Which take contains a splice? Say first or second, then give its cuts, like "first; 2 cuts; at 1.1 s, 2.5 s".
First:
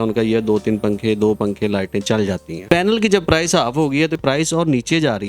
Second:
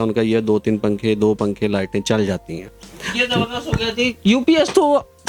first; 2 cuts; at 2.6 s, 4.2 s